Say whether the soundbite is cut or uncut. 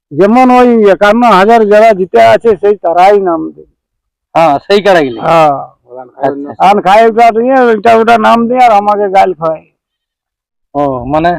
uncut